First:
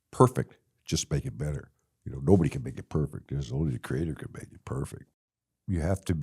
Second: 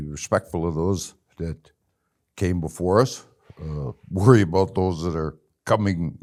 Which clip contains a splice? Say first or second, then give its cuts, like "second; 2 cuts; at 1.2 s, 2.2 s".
first; 1 cut; at 5.0 s